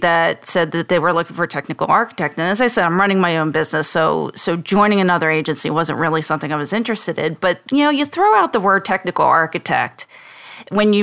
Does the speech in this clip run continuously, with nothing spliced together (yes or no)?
yes